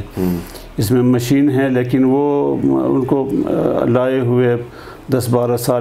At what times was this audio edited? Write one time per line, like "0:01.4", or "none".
none